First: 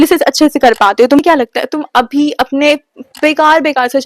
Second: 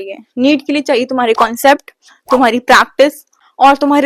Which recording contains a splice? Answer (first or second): first